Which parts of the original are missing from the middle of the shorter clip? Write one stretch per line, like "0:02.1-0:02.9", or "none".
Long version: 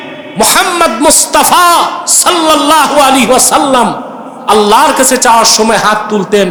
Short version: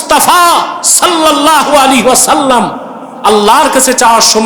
none